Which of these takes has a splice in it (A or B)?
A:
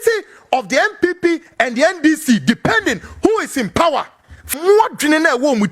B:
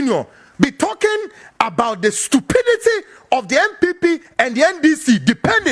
A